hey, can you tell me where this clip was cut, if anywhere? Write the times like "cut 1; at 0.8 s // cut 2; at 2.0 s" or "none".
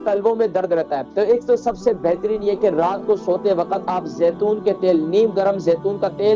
cut 1; at 1.0 s